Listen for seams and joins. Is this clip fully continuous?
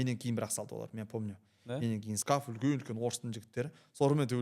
no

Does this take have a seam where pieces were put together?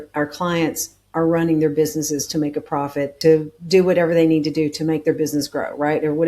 yes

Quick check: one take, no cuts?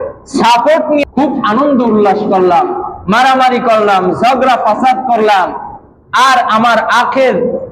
no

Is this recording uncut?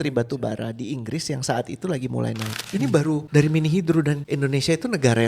no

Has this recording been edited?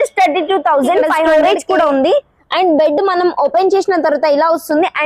yes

